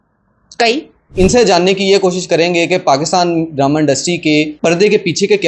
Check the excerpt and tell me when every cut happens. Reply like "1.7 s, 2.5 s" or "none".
1.1 s, 4.5 s